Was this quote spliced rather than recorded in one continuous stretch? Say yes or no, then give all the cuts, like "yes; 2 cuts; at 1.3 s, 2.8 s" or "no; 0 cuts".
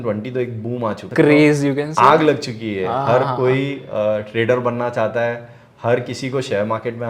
yes; 1 cut; at 1.1 s